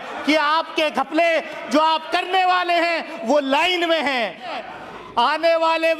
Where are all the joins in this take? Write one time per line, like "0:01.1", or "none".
0:04.6